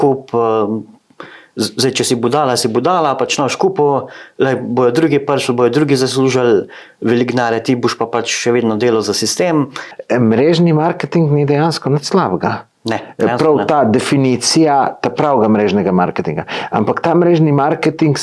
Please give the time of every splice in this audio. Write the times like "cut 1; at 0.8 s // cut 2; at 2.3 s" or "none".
cut 1; at 9.9 s